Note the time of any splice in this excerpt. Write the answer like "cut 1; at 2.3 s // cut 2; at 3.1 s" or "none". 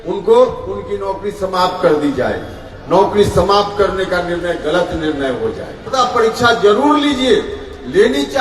cut 1; at 5.9 s